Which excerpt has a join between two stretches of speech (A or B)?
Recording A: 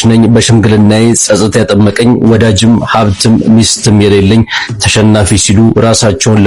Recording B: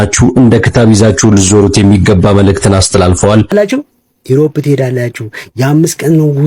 B